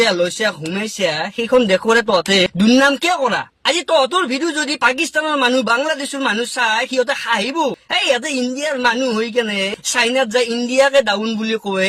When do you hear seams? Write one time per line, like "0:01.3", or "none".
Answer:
none